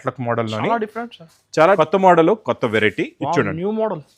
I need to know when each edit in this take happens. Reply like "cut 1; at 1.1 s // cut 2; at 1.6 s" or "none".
cut 1; at 1.8 s